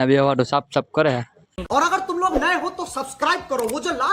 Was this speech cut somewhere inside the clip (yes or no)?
yes